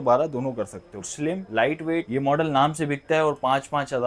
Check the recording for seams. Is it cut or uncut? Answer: cut